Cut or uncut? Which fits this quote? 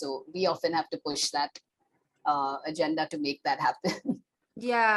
uncut